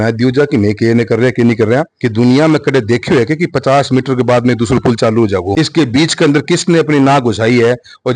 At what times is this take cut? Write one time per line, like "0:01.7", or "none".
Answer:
0:02.0
0:05.5

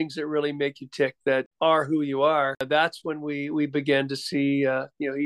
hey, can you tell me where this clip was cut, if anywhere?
0:01.5
0:02.6

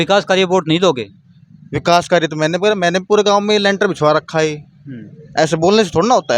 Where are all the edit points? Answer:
none

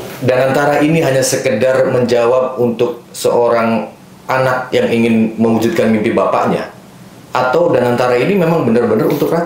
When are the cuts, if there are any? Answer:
none

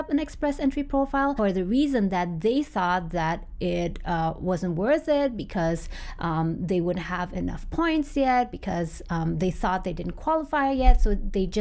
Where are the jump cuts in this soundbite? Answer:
0:01.3

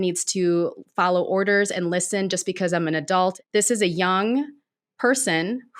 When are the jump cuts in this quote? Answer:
0:03.4

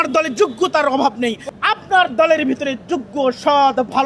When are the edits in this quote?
0:01.4

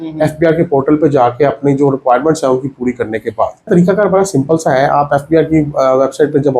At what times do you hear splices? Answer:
0:03.7

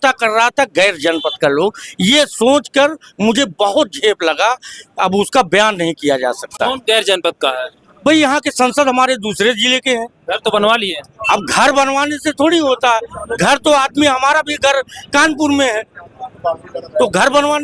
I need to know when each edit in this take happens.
none

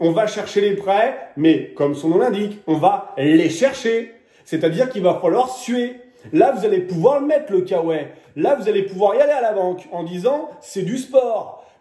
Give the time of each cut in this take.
none

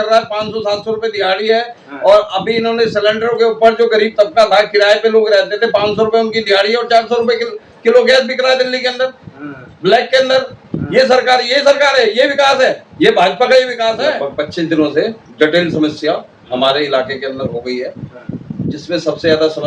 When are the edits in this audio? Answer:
0:14.1

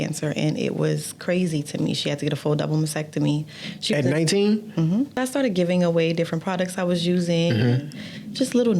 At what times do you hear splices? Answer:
0:05.1

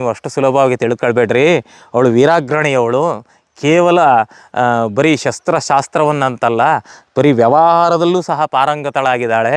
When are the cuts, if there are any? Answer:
none

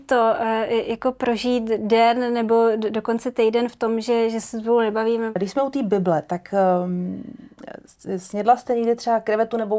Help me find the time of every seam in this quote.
0:05.4

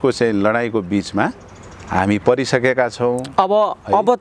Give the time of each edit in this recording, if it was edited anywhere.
none

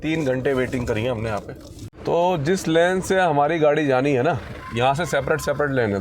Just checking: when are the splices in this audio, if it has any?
0:02.2

